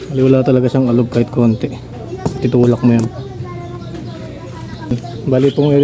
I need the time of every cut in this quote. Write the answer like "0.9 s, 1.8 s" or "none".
4.9 s